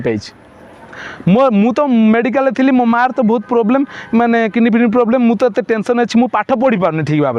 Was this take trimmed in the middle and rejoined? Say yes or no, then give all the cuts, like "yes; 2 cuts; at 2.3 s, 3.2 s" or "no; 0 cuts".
no; 0 cuts